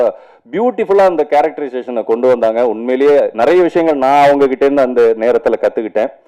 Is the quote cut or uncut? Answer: uncut